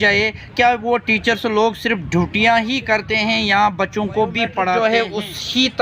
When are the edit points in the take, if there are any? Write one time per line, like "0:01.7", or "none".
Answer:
0:04.8